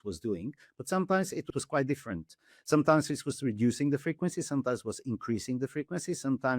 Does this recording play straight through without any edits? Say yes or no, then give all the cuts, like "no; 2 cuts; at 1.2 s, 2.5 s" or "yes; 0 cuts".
no; 1 cut; at 1.5 s